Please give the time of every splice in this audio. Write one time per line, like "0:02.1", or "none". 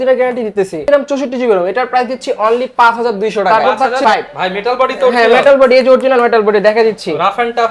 0:00.9
0:04.0